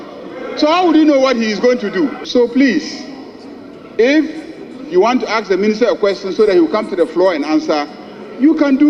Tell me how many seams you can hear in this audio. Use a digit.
1